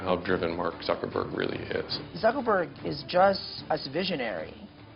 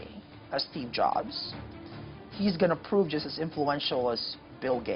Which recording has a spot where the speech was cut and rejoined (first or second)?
first